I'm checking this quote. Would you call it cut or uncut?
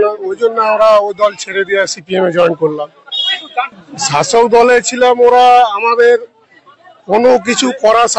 uncut